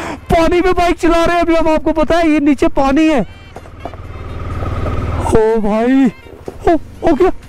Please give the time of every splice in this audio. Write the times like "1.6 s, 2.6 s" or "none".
none